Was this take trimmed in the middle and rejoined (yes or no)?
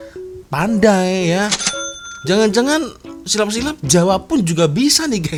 no